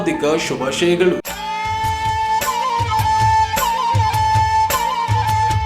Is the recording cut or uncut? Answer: cut